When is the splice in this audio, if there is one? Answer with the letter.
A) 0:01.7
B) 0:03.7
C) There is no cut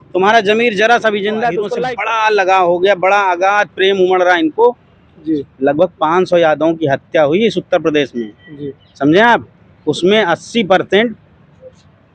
A